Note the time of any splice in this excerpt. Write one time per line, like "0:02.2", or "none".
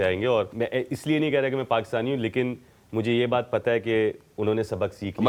none